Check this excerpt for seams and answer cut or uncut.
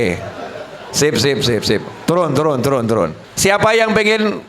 cut